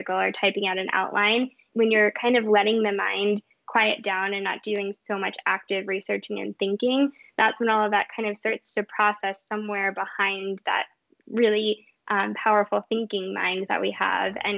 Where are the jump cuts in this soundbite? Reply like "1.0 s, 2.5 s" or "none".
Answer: 1.7 s